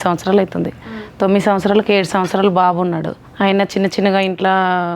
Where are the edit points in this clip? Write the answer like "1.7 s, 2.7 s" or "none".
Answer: 3.2 s

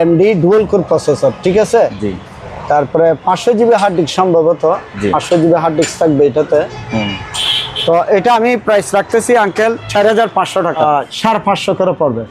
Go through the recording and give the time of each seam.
10.8 s

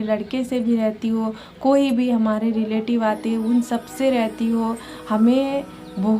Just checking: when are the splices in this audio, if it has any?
none

